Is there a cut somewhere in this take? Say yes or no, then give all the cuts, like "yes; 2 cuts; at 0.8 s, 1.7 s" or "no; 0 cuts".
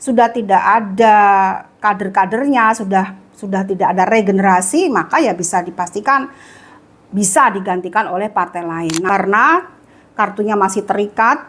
yes; 1 cut; at 9.0 s